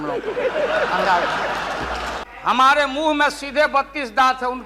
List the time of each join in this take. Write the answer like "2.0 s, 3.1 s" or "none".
2.2 s